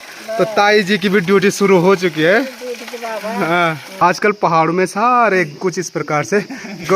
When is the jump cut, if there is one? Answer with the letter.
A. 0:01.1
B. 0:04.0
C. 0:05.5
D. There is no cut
B